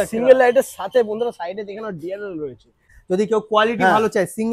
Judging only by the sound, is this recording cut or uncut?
cut